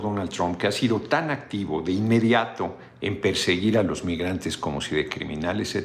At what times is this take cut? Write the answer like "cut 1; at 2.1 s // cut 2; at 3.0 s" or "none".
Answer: none